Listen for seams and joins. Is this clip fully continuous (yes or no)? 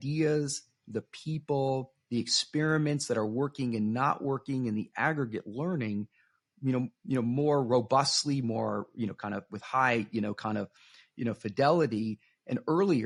yes